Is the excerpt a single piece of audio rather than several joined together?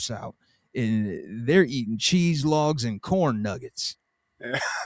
yes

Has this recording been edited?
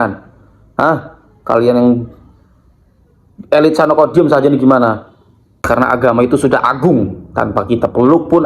yes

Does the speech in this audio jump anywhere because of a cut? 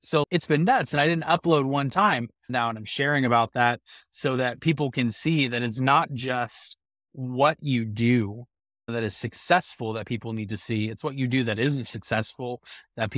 yes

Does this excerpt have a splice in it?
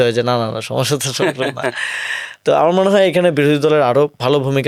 no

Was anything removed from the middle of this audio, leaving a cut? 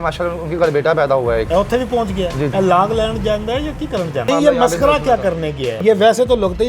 yes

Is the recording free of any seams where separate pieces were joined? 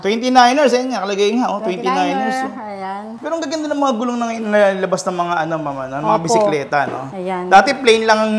no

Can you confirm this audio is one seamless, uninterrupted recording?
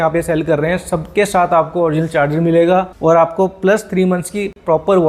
yes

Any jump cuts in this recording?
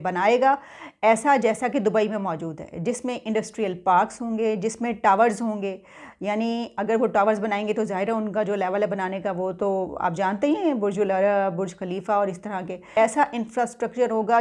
yes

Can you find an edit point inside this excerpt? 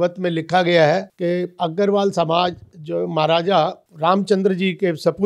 yes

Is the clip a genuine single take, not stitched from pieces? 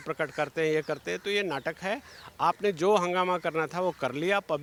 yes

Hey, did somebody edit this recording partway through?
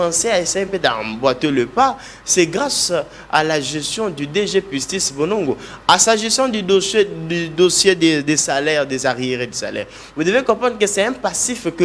no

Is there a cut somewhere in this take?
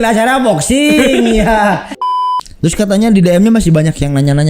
yes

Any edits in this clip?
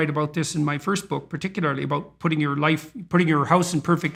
no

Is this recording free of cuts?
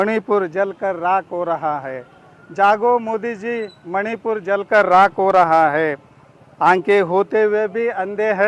yes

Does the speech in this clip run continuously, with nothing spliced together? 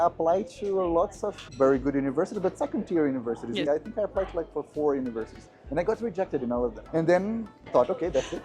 no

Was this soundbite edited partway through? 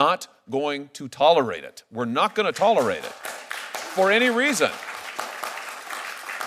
no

